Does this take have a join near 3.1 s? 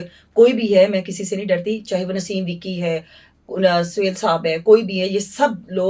no; 0 cuts

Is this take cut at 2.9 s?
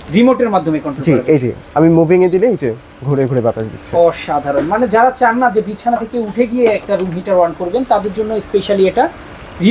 no; 0 cuts

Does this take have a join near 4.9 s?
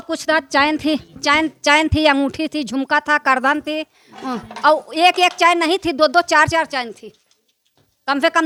no; 0 cuts

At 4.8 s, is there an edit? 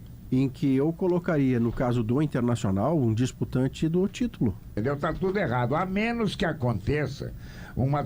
yes; 1 cut; at 4.8 s

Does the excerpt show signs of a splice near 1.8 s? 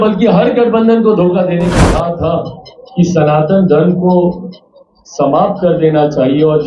yes; 1 cut; at 1.8 s

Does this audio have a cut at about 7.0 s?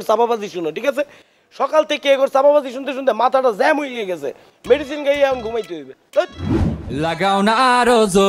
yes; 1 cut; at 7.0 s

